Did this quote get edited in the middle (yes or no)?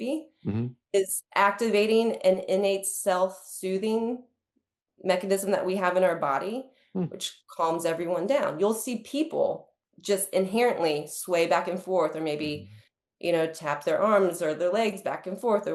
no